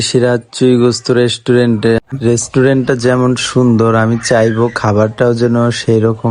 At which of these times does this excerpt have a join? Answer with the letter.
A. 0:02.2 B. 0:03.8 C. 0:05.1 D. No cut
A